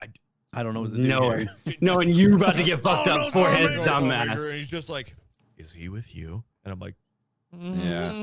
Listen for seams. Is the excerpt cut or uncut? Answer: uncut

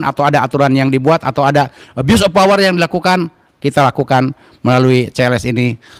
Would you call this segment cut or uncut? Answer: uncut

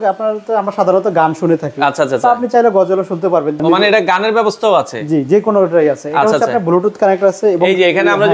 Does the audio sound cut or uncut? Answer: cut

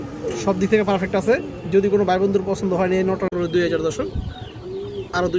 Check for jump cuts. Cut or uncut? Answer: cut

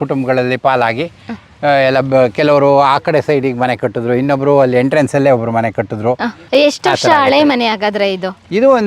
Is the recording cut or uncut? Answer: cut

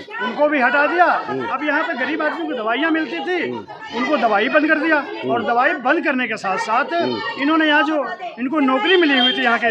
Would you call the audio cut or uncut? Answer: uncut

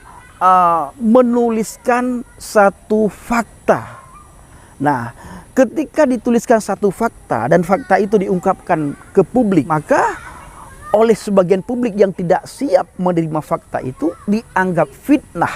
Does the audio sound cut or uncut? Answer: cut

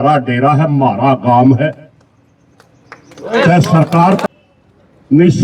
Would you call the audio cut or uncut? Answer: cut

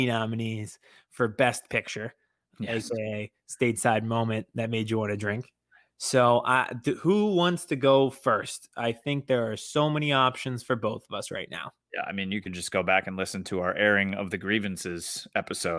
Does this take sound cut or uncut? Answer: uncut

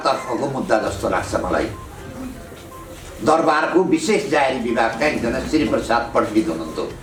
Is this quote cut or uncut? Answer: uncut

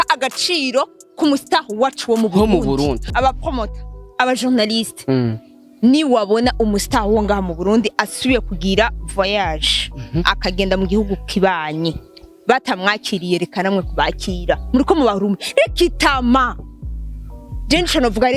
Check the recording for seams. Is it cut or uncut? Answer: cut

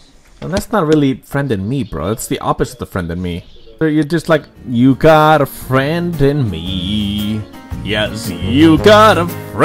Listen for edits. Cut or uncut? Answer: uncut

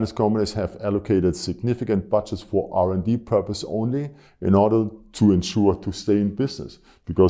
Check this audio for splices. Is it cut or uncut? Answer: uncut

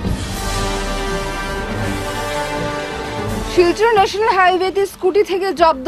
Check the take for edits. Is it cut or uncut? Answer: uncut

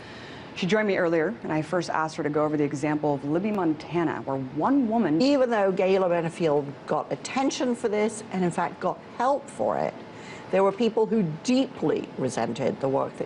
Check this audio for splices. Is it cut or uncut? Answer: uncut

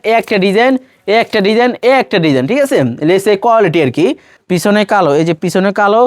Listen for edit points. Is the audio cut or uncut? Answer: cut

